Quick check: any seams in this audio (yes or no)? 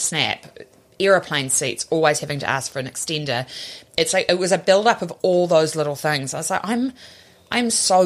no